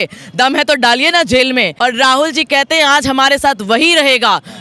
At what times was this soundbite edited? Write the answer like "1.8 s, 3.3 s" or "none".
1.7 s

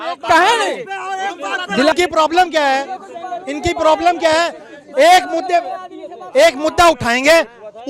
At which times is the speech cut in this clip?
none

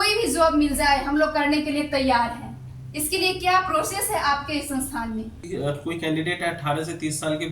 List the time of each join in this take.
5.4 s

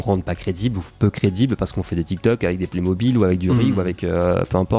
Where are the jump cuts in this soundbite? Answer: none

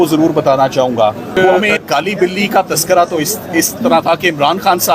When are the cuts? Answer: 1.6 s

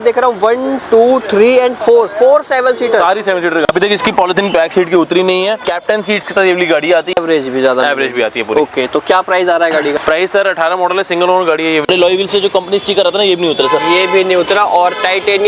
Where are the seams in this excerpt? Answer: 3.7 s, 5.7 s, 7.2 s, 9.9 s, 11.8 s

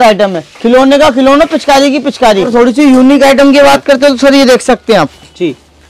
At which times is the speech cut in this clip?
2.8 s

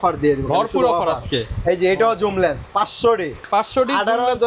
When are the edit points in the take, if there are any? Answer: none

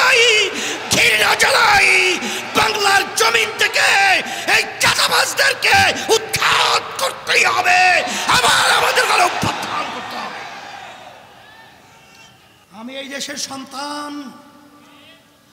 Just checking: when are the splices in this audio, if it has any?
12.6 s

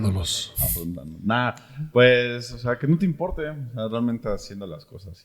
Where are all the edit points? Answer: none

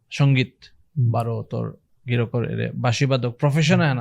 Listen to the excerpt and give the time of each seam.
none

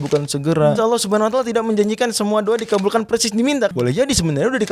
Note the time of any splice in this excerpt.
0.8 s, 3.7 s

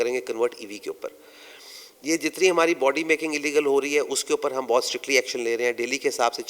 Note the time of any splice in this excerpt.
none

